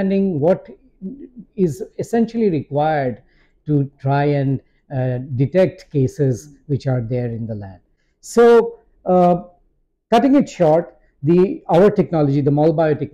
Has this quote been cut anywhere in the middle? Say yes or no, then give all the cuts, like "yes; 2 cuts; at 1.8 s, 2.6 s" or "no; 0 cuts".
no; 0 cuts